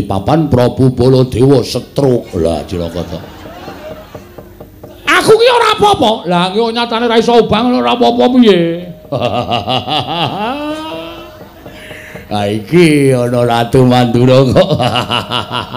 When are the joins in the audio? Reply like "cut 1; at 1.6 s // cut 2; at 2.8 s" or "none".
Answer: none